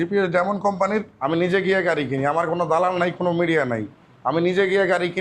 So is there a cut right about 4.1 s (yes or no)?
no